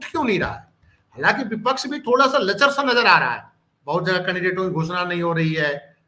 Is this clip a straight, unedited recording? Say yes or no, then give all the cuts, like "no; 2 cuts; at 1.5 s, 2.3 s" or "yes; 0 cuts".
yes; 0 cuts